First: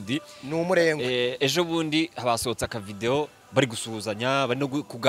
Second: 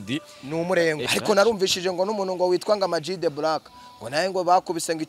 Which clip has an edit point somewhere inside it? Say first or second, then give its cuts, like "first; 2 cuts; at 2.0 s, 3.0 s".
second; 1 cut; at 1.1 s